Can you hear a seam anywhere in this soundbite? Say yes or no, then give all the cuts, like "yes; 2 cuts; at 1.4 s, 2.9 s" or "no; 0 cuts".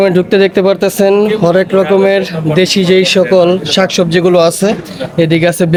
no; 0 cuts